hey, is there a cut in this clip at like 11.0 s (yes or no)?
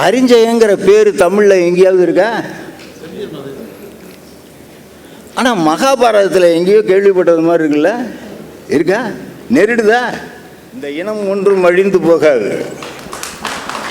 yes